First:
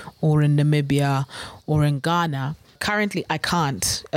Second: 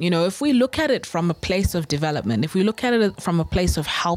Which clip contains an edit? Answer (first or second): first